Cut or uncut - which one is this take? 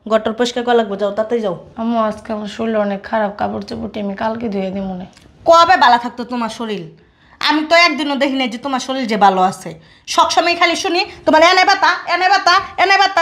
uncut